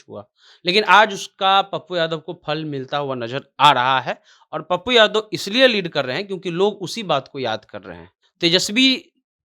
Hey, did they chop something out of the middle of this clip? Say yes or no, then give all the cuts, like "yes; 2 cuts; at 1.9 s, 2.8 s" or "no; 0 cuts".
yes; 1 cut; at 8.2 s